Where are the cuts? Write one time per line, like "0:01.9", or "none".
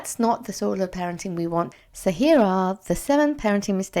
0:01.7